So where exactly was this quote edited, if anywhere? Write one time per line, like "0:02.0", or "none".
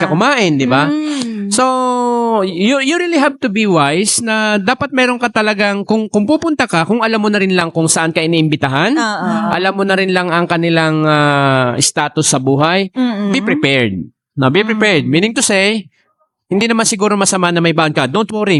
none